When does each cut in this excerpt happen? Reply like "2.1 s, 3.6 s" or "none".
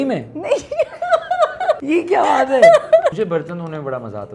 1.8 s, 3.1 s